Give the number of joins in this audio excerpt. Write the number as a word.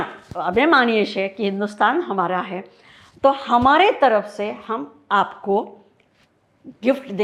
zero